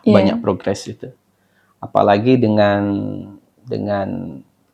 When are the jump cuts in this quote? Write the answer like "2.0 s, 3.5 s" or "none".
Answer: none